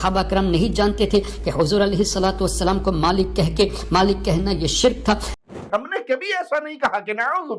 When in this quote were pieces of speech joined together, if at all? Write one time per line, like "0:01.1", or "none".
0:05.3